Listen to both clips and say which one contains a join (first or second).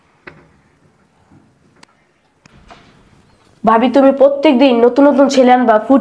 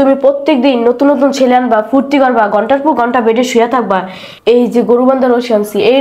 first